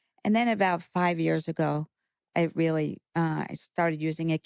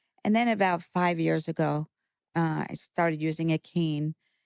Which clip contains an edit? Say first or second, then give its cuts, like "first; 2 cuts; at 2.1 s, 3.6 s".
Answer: second; 1 cut; at 2.2 s